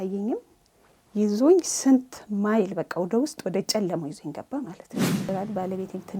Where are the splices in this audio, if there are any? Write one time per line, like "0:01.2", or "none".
0:05.3